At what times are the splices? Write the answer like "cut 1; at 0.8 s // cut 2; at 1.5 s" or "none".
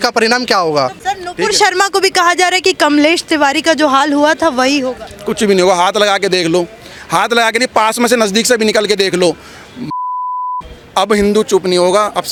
none